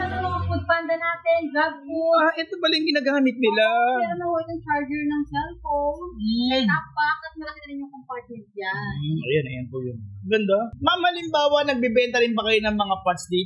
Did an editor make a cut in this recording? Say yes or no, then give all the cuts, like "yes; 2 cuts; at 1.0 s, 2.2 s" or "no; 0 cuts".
yes; 1 cut; at 10.7 s